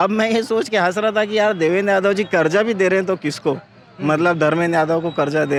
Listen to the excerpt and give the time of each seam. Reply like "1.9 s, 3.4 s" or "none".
none